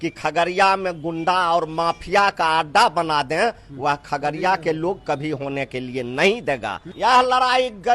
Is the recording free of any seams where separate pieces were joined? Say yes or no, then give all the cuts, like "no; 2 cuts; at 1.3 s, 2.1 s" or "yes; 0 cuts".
no; 1 cut; at 6.8 s